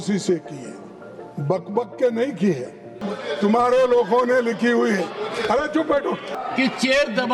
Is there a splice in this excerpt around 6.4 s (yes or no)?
yes